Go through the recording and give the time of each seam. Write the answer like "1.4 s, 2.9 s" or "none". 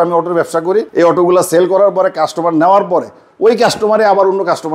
none